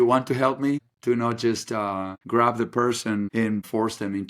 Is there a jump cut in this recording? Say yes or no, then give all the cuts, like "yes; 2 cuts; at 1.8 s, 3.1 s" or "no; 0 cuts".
yes; 3 cuts; at 0.9 s, 2.1 s, 3.5 s